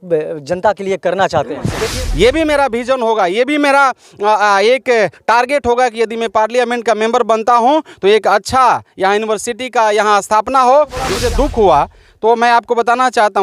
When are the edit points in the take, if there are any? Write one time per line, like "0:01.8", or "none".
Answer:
0:01.8
0:11.2